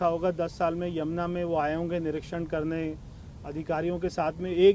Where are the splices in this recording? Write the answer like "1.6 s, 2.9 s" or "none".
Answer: none